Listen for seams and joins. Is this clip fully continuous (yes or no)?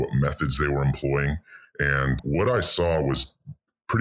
no